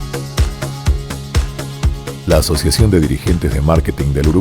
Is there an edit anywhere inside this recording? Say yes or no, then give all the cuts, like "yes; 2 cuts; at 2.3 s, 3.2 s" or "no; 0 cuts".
yes; 1 cut; at 1.8 s